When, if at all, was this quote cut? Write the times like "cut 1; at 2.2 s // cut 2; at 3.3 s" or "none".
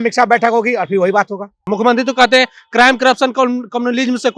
cut 1; at 1.6 s